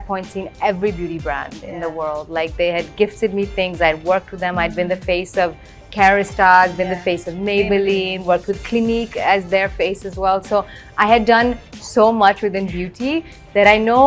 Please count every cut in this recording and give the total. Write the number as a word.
zero